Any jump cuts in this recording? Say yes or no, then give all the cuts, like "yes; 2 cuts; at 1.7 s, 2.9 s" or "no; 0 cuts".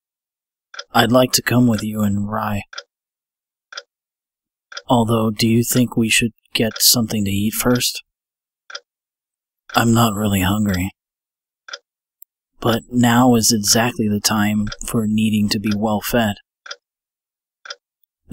no; 0 cuts